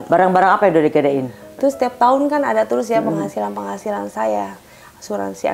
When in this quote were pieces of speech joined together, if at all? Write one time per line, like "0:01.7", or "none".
0:01.4